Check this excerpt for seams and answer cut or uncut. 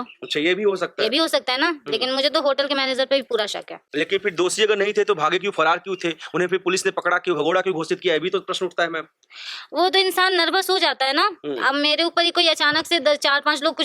uncut